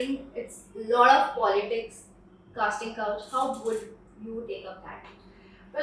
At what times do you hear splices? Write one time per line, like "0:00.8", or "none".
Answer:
none